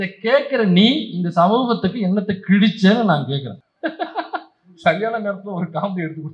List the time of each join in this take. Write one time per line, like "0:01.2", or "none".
0:03.7